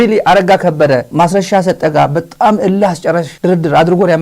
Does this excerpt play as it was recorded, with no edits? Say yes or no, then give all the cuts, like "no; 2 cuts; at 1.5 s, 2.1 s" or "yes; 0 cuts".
no; 2 cuts; at 1.1 s, 3.3 s